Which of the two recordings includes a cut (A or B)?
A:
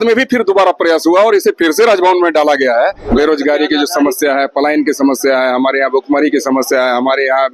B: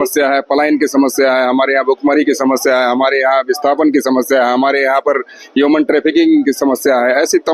A